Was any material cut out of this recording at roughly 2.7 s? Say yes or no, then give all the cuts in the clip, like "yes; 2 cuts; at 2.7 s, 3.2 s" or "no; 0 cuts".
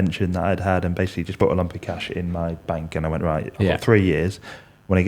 no; 1 cut; at 1.3 s